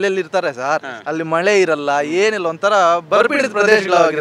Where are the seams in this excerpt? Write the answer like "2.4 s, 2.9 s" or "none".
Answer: none